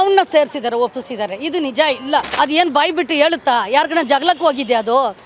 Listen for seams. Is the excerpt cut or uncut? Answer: cut